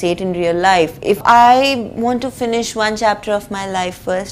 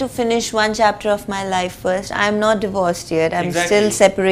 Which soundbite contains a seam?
first; 1 cut; at 1.2 s

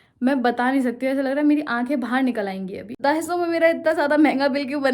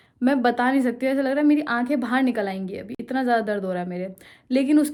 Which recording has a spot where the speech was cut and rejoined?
first; 1 cut; at 2.9 s

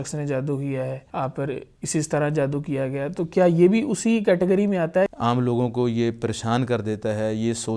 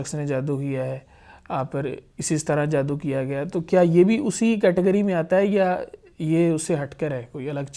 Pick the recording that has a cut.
first; 2 cuts; at 1.0 s, 5.1 s

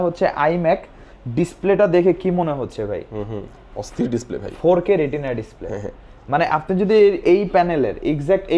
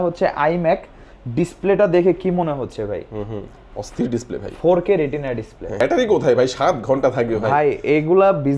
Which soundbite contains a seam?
second; 1 cut; at 5.8 s

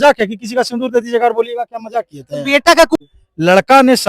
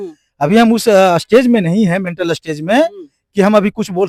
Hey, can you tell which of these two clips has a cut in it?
first; 1 cut; at 3.0 s

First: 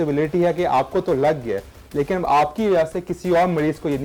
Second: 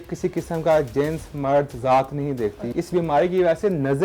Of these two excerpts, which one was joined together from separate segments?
second; 1 cut; at 2.6 s

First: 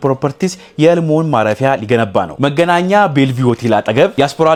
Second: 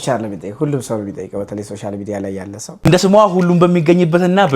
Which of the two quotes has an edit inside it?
second; 1 cut; at 2.6 s

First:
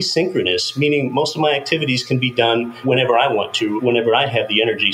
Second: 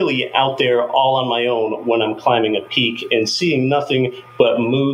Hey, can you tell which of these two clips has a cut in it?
first; 2 cuts; at 2.7 s, 3.8 s

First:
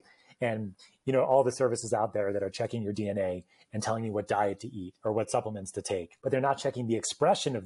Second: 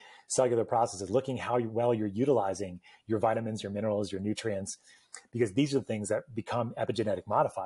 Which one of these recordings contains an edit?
first; 1 cut; at 6.1 s

